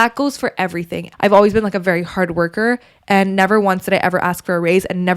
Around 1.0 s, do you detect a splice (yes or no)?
yes